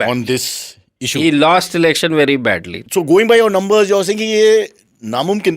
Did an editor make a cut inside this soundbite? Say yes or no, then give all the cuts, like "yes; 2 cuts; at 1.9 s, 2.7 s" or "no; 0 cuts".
yes; 1 cut; at 2.7 s